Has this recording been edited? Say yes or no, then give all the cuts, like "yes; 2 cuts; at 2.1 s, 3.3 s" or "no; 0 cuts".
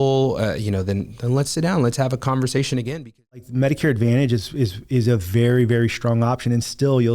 yes; 1 cut; at 3.5 s